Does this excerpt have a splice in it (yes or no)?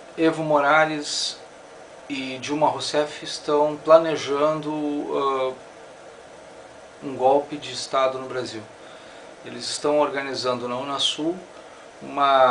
no